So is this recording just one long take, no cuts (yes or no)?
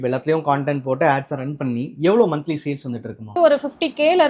no